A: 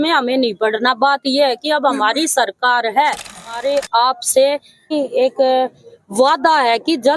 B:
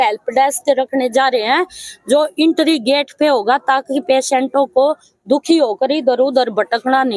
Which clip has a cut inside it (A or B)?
A